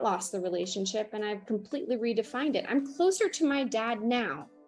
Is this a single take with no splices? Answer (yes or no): yes